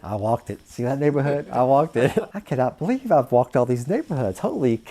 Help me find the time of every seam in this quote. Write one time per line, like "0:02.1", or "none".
0:02.3